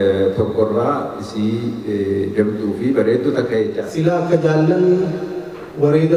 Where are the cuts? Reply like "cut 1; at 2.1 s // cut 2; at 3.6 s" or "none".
cut 1; at 3.8 s